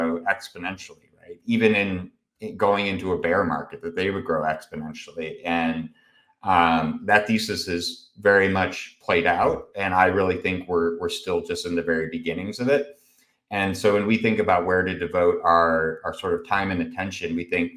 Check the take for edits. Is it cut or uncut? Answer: uncut